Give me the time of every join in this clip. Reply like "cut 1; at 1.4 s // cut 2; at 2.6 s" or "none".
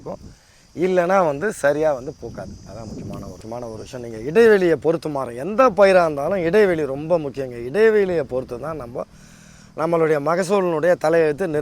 cut 1; at 3.4 s